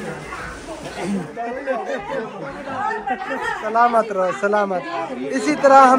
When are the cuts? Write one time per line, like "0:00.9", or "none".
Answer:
0:01.3
0:03.7